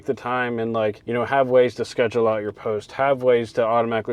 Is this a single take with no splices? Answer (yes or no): yes